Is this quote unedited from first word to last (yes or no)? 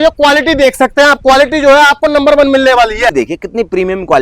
no